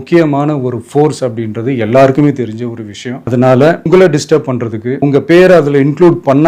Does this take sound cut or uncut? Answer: uncut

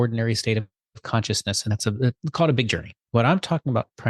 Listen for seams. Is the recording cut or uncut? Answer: cut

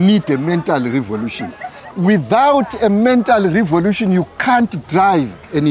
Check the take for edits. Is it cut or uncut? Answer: uncut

